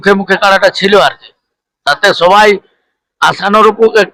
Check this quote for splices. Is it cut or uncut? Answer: uncut